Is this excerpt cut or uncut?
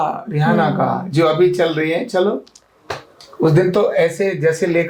uncut